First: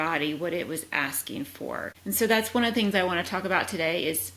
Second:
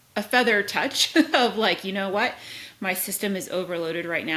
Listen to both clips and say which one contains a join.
first; 1 cut; at 1.9 s

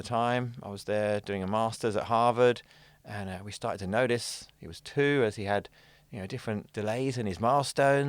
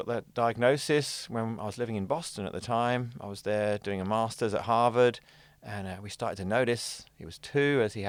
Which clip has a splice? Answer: first; 1 cut; at 6.7 s

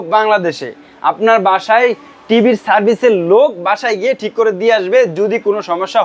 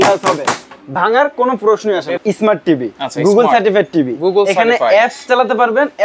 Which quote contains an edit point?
second; 1 cut; at 2.2 s

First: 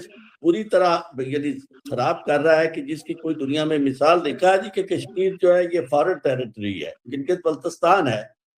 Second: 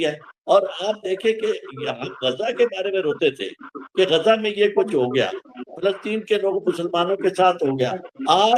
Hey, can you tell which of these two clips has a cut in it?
first; 2 cuts; at 4.4 s, 7.2 s

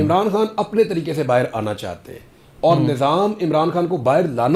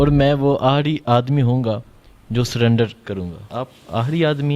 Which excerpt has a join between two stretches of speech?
second; 1 cut; at 3.5 s

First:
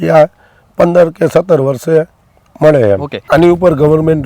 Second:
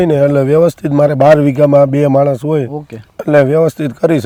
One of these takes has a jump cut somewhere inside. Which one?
first; 1 cut; at 3.2 s

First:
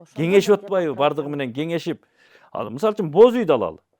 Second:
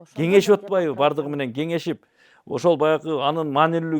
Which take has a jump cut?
first; 1 cut; at 2.3 s

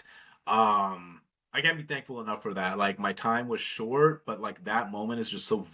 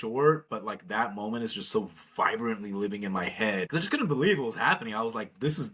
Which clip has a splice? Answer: second; 1 cut; at 3.7 s

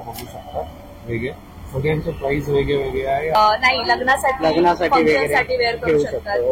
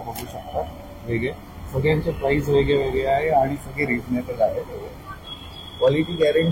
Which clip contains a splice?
first; 1 cut; at 3.4 s

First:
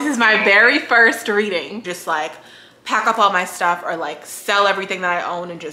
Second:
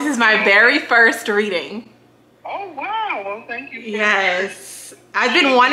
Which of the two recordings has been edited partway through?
first; 1 cut; at 1.8 s

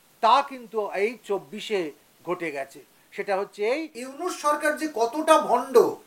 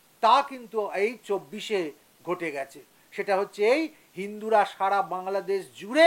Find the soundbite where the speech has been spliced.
first; 1 cut; at 4.0 s

